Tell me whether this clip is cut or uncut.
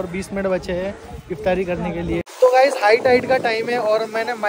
cut